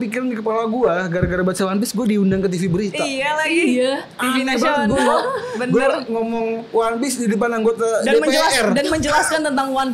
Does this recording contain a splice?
no; 0 cuts

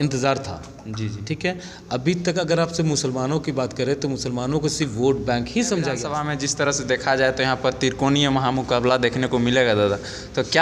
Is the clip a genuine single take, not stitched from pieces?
no; 1 cut; at 6.2 s

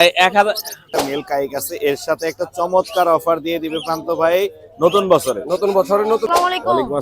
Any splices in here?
yes; 2 cuts; at 0.9 s, 6.2 s

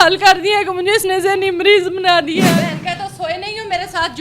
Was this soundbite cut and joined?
yes; 1 cut; at 2.5 s

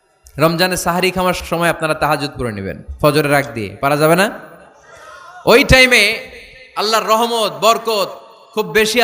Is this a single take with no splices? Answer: no; 1 cut; at 1.4 s

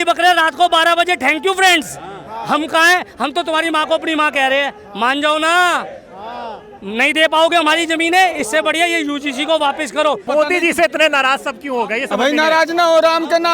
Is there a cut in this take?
yes; 1 cut; at 10.2 s

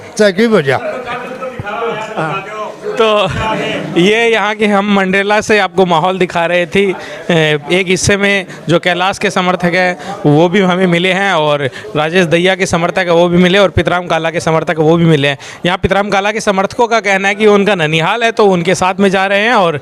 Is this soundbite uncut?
yes; 0 cuts

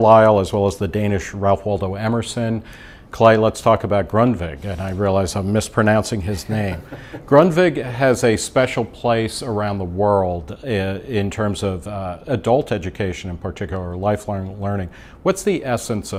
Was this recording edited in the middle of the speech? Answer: no; 0 cuts

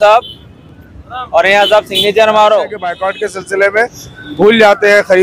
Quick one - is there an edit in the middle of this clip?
yes; 1 cut; at 3.0 s

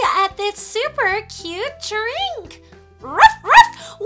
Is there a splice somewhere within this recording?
no; 0 cuts

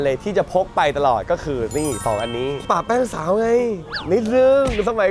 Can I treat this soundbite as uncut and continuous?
yes; 0 cuts

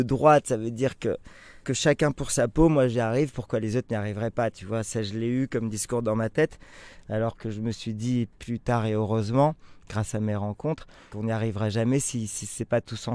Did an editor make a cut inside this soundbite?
yes; 2 cuts; at 1.6 s, 11.1 s

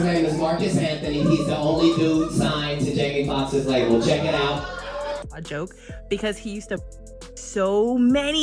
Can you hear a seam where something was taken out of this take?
yes; 1 cut; at 5.2 s

